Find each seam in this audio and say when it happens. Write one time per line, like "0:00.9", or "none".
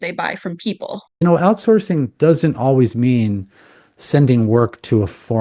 0:01.2